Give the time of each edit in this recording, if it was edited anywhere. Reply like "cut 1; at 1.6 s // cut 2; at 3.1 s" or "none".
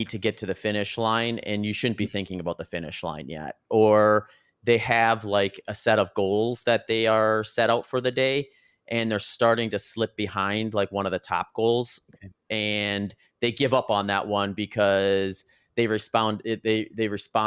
none